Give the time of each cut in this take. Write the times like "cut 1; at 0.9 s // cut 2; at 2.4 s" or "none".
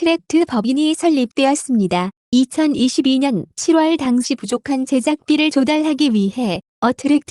none

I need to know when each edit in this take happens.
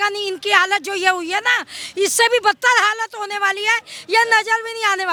none

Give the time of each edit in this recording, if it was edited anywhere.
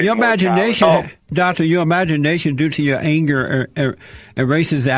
none

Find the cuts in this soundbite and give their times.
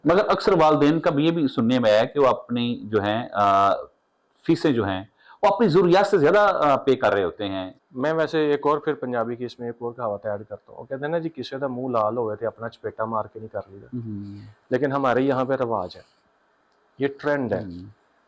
none

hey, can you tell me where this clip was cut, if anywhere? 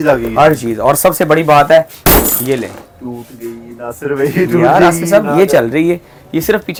none

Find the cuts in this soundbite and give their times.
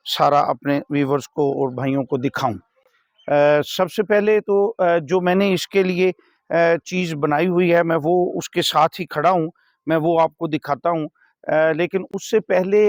none

